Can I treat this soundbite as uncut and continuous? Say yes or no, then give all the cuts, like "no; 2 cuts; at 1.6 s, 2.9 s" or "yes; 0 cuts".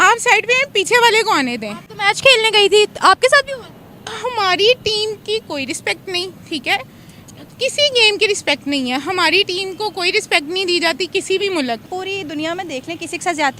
no; 1 cut; at 11.9 s